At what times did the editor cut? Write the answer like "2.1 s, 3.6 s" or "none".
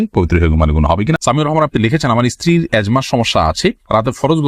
1.2 s